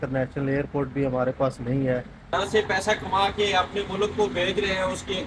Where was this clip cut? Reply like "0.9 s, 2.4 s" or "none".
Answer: 2.2 s